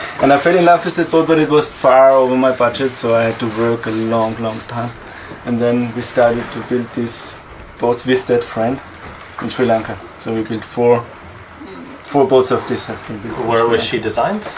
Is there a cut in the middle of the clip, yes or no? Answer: yes